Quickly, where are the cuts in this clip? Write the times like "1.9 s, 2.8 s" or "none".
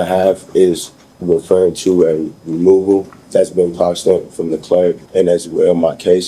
3.2 s, 5.0 s